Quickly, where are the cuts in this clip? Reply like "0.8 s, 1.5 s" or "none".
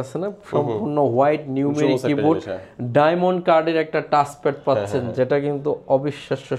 none

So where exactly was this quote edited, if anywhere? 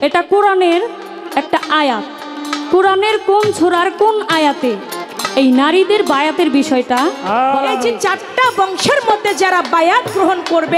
7.9 s

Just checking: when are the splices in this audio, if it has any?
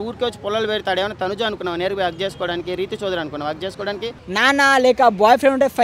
4.2 s

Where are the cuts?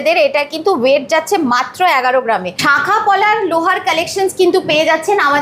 2.5 s

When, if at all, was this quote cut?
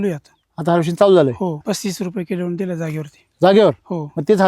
1.6 s

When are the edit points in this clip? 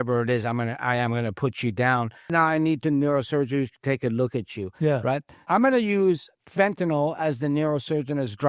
2.2 s, 5.3 s

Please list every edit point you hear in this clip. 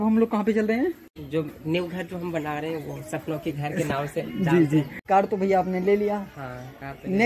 1.1 s, 5.0 s

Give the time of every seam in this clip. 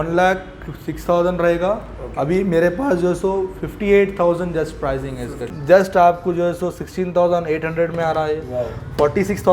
5.4 s

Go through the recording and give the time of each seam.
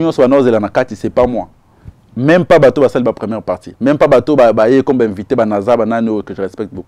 none

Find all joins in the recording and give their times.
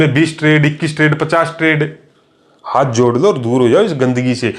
none

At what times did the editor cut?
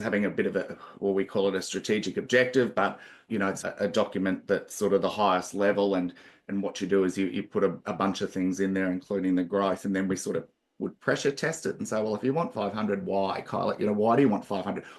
none

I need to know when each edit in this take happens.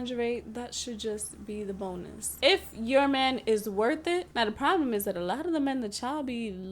2.3 s, 4.3 s

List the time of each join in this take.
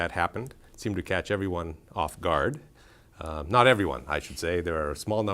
2.3 s

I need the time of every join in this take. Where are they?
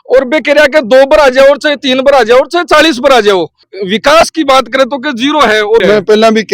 3.6 s, 5.8 s

